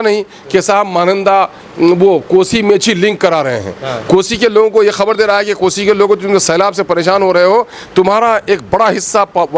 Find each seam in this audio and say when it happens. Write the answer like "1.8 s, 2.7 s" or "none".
none